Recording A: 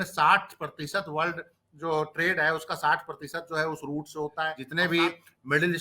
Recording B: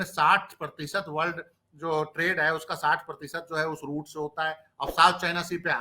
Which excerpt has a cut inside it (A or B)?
A